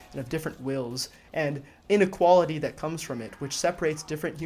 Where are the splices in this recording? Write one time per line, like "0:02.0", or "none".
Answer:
none